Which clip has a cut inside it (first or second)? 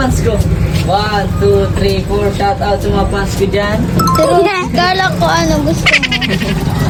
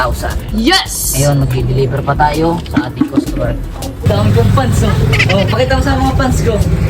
second